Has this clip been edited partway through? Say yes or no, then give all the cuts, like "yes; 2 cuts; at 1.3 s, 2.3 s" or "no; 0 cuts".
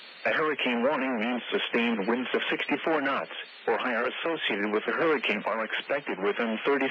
yes; 1 cut; at 1.0 s